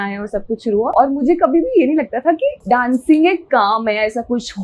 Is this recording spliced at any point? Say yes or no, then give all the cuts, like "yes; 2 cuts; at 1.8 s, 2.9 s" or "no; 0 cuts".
yes; 2 cuts; at 0.9 s, 2.6 s